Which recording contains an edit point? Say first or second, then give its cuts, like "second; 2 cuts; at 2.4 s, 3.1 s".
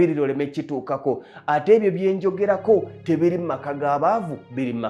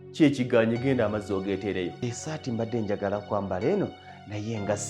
second; 1 cut; at 2.0 s